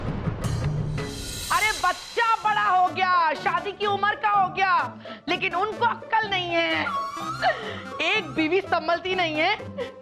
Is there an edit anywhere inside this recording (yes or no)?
yes